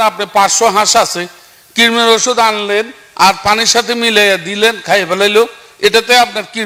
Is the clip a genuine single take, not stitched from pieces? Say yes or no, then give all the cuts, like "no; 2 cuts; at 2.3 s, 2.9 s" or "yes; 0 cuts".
yes; 0 cuts